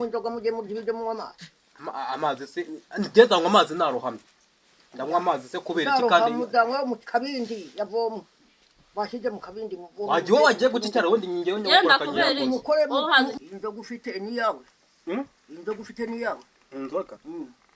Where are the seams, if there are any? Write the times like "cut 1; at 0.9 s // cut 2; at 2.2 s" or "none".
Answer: cut 1; at 13.3 s